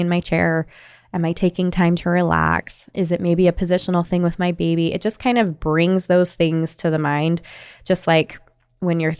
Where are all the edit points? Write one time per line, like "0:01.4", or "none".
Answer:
0:02.8